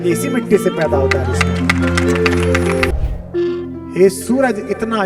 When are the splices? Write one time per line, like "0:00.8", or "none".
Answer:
0:02.9